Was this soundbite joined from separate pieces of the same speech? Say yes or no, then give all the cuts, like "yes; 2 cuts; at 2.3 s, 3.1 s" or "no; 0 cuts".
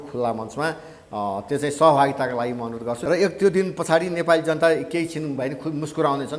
yes; 1 cut; at 2.9 s